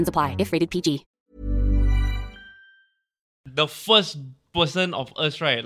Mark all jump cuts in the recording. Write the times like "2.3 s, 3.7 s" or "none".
3.4 s

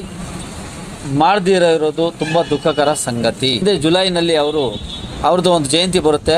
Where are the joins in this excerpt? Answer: 3.6 s

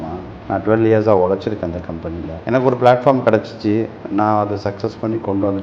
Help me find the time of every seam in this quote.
2.4 s

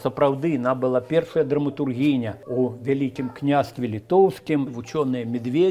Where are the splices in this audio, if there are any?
2.4 s, 4.7 s

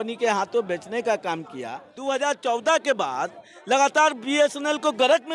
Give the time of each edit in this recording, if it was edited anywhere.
2.0 s

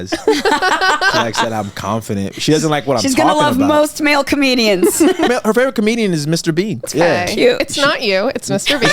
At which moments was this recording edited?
1.1 s, 5.3 s, 6.9 s

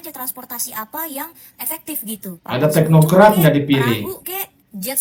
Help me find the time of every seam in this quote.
none

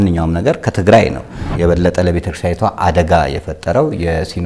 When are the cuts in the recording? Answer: 1.5 s

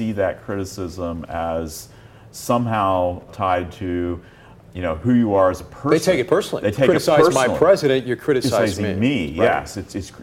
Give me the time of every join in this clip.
3.3 s, 4.5 s

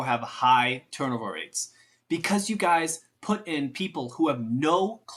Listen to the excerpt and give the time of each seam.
none

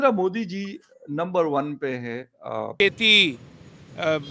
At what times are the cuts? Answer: 2.7 s

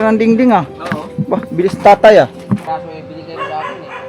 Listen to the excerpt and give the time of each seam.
2.6 s

